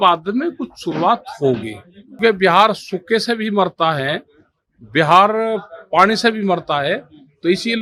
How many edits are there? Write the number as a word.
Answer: one